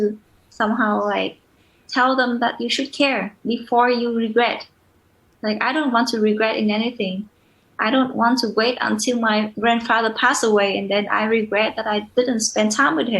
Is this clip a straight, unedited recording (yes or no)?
no